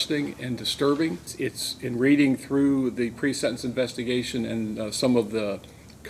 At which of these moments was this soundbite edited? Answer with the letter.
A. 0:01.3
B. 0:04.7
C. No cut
A